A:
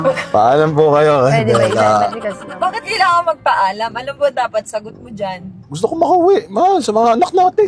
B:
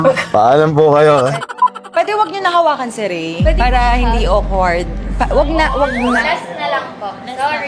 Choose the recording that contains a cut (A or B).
B